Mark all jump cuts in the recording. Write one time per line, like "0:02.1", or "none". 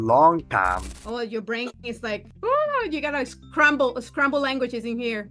0:00.9
0:02.3